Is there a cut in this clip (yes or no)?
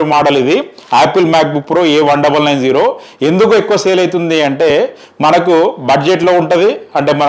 no